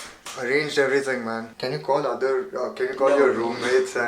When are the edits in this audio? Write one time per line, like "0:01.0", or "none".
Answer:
0:01.6